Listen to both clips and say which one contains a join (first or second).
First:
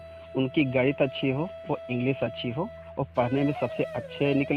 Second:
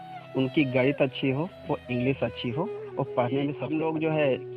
second